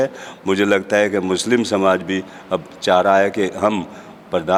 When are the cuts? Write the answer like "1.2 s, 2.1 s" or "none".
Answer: none

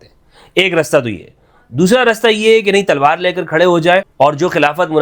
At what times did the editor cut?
4.1 s

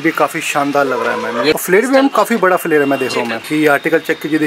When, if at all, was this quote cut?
1.5 s, 3.4 s

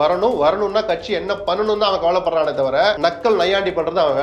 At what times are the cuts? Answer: 3.0 s

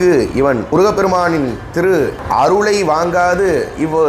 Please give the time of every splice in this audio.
0.7 s, 2.2 s

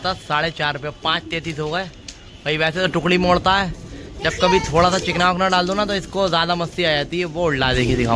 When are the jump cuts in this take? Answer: none

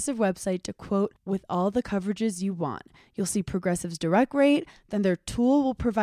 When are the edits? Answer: none

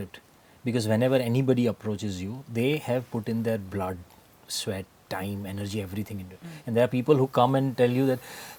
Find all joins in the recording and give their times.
none

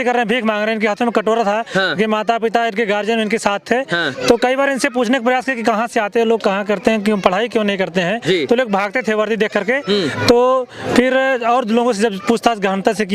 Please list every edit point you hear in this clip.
none

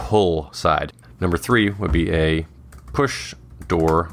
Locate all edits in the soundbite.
0.9 s

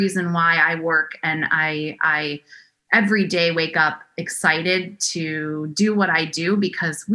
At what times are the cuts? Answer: none

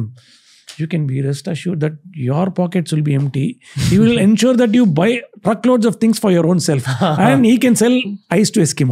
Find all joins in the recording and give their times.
none

